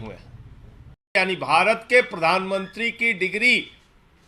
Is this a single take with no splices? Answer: no; 1 cut; at 1.2 s

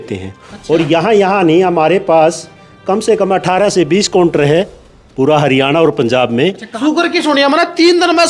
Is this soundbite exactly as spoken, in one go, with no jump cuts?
no; 1 cut; at 6.7 s

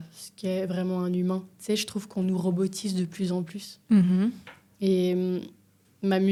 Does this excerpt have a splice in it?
no; 0 cuts

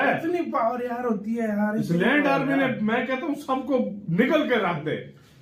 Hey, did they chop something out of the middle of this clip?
no; 0 cuts

